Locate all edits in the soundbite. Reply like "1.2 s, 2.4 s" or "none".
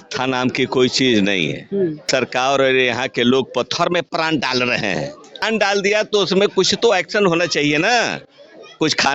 2.1 s, 5.2 s